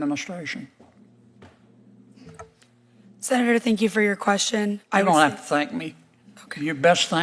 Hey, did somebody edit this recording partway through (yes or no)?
no